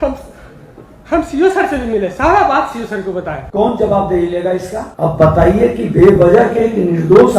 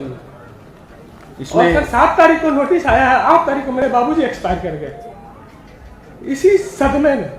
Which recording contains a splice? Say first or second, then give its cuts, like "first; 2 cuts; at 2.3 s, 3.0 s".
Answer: first; 2 cuts; at 3.4 s, 4.8 s